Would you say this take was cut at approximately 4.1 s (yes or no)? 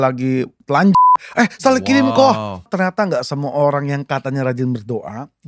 no